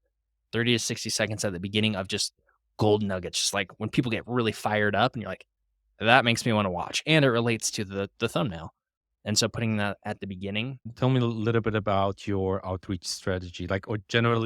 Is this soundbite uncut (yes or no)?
no